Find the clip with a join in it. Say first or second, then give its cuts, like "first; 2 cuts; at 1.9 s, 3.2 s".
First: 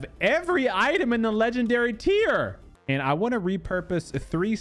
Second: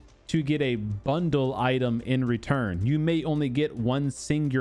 first; 1 cut; at 2.7 s